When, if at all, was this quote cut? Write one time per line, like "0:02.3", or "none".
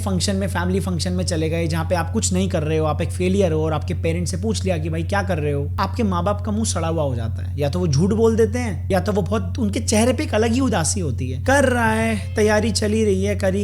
0:05.7
0:08.8
0:11.2